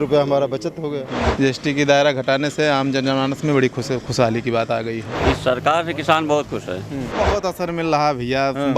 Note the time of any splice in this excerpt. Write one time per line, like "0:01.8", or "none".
0:01.2
0:05.1
0:07.2